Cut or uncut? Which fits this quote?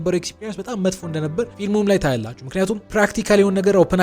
cut